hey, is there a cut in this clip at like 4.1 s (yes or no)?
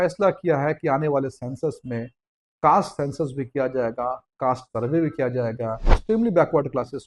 no